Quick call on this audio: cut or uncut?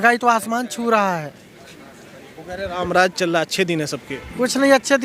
uncut